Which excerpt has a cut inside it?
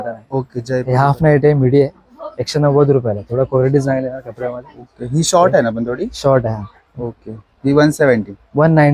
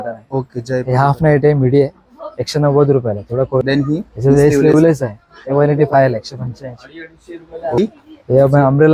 second; 2 cuts; at 3.6 s, 7.8 s

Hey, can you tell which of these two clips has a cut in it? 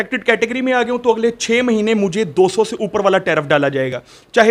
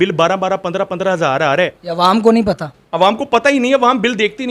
second; 1 cut; at 1.8 s

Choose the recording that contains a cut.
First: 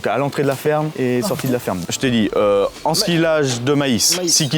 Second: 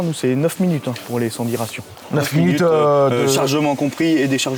first; 1 cut; at 1.9 s

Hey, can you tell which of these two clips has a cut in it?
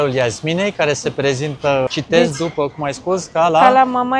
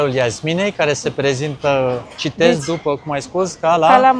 first; 1 cut; at 1.9 s

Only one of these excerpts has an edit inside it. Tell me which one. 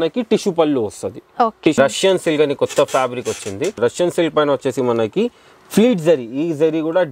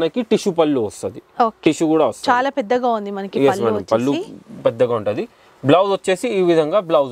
first; 2 cuts; at 1.8 s, 3.8 s

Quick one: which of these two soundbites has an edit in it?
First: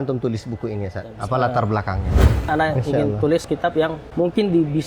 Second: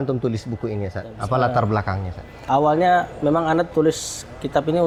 first; 2 cuts; at 2.5 s, 3.5 s

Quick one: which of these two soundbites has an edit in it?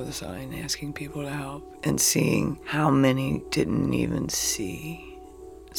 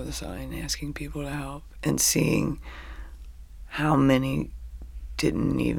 first; 2 cuts; at 2.6 s, 3.5 s

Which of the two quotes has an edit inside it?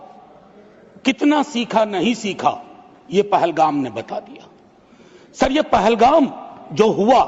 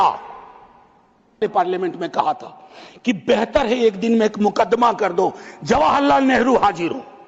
second; 1 cut; at 1.4 s

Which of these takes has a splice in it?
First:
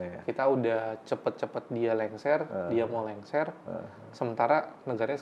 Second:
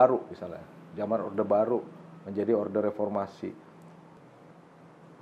second; 1 cut; at 4.1 s

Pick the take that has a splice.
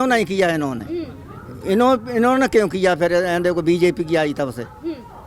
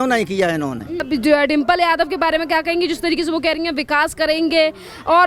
second; 1 cut; at 1.0 s

